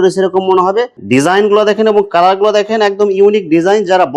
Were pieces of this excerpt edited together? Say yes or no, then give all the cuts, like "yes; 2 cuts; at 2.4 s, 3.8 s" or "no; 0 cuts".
yes; 1 cut; at 1.0 s